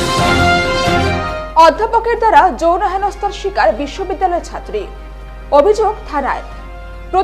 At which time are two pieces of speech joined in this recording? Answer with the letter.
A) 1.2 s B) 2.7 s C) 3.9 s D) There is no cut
A